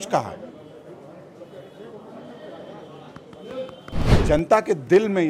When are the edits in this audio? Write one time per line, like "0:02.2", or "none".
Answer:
0:04.2